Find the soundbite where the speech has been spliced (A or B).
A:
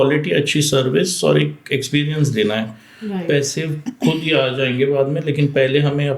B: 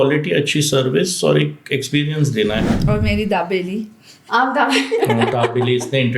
B